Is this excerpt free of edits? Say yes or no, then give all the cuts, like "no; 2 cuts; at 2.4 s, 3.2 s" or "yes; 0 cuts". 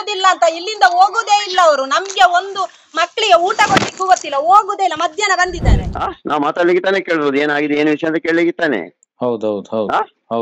no; 1 cut; at 5.9 s